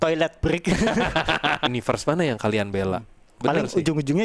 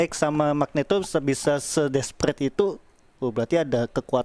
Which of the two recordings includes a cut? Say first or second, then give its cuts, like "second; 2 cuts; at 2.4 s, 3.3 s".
first; 1 cut; at 1.7 s